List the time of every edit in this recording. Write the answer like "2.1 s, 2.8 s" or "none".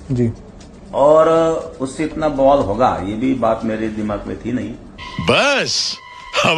5.1 s